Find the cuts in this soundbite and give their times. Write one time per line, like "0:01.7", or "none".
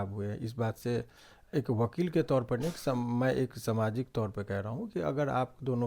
none